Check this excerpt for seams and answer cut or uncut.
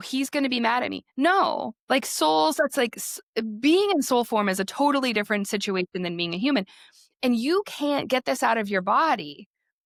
uncut